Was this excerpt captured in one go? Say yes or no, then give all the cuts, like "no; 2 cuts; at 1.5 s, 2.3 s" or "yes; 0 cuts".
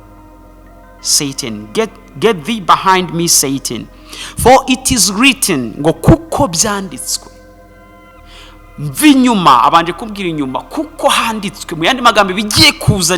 yes; 0 cuts